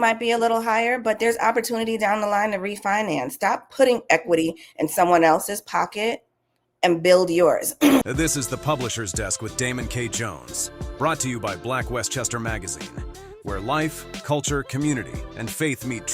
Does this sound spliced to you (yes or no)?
yes